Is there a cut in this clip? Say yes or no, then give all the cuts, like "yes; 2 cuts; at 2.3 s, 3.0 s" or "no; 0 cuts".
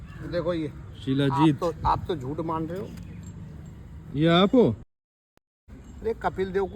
yes; 1 cut; at 5.3 s